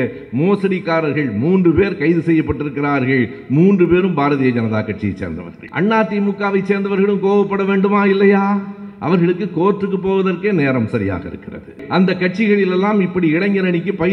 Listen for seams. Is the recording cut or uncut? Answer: cut